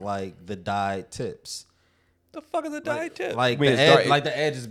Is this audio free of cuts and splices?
yes; 0 cuts

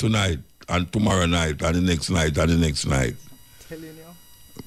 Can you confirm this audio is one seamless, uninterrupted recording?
yes; 0 cuts

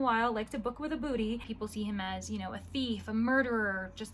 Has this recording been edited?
yes; 1 cut; at 1.5 s

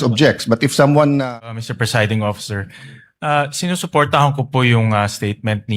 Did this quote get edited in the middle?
yes; 1 cut; at 1.5 s

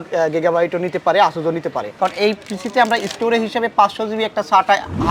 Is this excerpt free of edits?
no; 1 cut; at 1.9 s

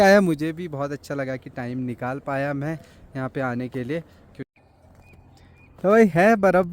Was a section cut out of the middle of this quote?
yes; 1 cut; at 4.4 s

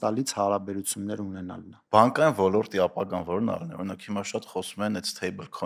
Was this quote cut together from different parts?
yes; 1 cut; at 1.7 s

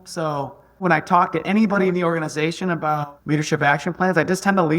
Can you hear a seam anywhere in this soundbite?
yes; 1 cut; at 3.1 s

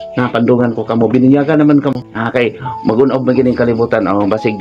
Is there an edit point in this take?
yes; 1 cut; at 2.1 s

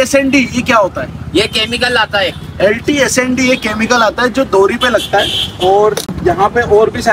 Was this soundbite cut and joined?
no; 0 cuts

